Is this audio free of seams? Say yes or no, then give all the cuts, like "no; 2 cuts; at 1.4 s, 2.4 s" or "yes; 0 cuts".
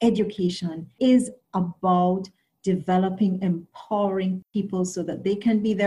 no; 1 cut; at 0.9 s